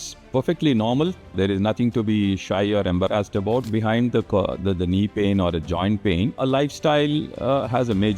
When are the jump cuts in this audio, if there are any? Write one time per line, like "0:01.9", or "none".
0:01.4
0:03.7
0:06.4